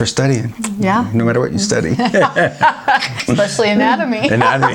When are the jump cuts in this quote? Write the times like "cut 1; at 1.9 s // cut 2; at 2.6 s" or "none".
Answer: cut 1; at 3.1 s

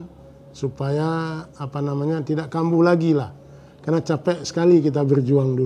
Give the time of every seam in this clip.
none

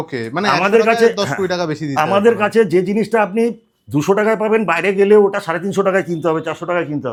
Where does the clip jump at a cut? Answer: none

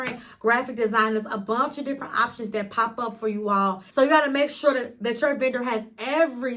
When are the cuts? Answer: cut 1; at 3.8 s

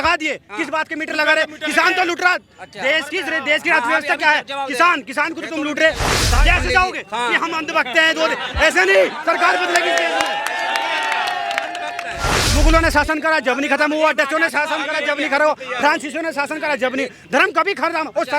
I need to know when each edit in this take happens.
cut 1; at 6.2 s // cut 2; at 12.4 s

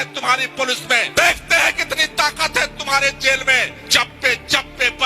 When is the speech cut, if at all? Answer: cut 1; at 1.1 s // cut 2; at 3.8 s

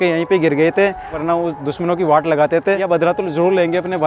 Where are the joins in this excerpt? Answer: cut 1; at 1.2 s // cut 2; at 2.9 s

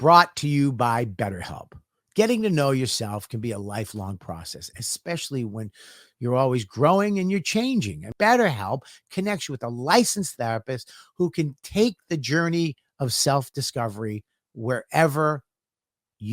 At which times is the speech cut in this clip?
cut 1; at 8.0 s

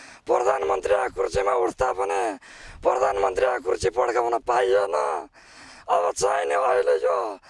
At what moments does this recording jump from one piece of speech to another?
none

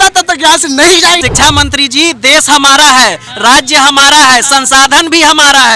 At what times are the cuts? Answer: cut 1; at 1.2 s

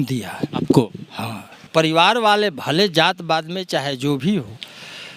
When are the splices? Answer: cut 1; at 1.6 s

